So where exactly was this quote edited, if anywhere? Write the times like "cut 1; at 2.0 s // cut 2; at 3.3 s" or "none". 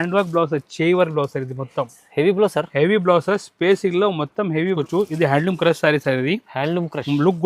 cut 1; at 4.8 s